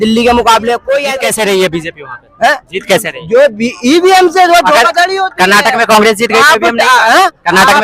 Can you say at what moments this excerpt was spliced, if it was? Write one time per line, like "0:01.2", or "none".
0:01.2